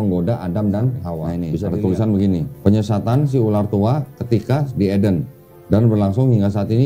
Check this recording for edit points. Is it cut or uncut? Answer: cut